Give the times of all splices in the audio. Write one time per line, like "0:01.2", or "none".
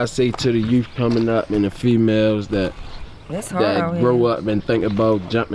none